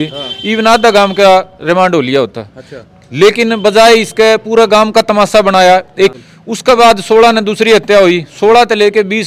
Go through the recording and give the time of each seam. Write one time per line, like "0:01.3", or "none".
0:06.1